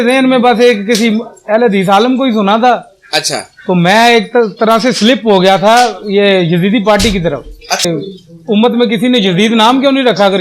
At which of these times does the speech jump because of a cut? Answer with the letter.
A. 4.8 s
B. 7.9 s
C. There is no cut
B